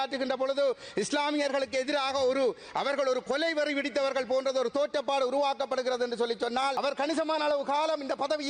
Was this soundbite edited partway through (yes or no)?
yes